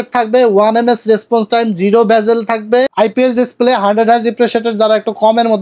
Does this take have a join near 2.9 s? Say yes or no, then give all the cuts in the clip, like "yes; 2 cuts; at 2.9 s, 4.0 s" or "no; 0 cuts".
yes; 1 cut; at 2.9 s